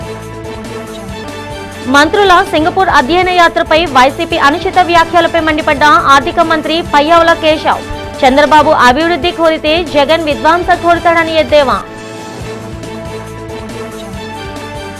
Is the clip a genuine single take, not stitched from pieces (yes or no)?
no